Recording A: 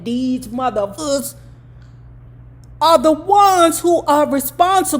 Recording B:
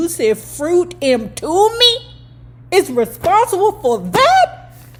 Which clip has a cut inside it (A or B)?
A